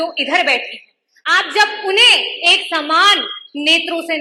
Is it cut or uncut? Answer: uncut